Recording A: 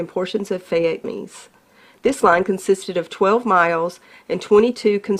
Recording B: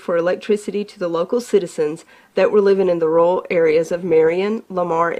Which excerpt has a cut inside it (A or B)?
A